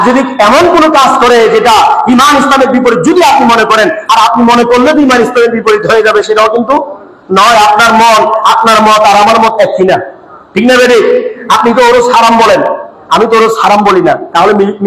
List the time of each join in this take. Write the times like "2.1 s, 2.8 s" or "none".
none